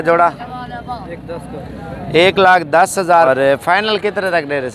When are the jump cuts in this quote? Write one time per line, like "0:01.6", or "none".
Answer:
0:03.2